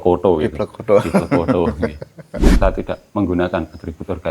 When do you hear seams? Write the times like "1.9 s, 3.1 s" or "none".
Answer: 2.5 s